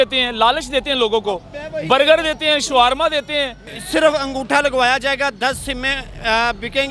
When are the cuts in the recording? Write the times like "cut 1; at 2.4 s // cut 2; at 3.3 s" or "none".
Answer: cut 1; at 3.6 s